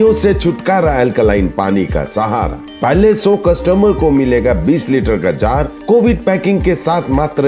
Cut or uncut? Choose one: uncut